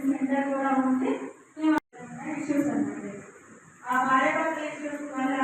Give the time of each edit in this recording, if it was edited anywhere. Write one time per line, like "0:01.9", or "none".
0:01.8